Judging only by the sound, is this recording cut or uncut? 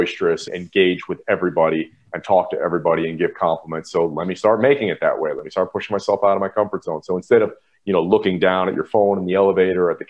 uncut